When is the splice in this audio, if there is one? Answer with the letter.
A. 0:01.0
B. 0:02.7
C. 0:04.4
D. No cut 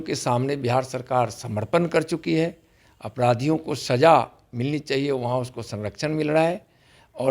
D